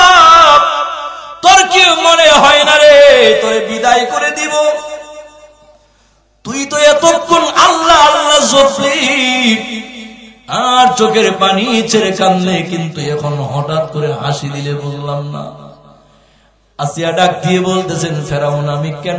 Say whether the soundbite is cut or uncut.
uncut